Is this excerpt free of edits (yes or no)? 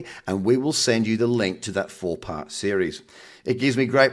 yes